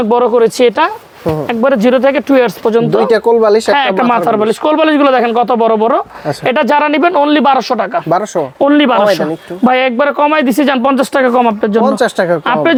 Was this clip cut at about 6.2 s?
no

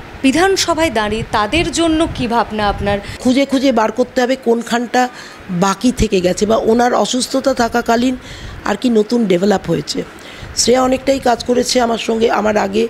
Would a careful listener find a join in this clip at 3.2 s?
yes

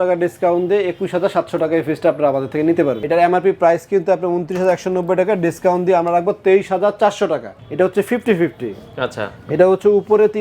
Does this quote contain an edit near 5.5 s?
no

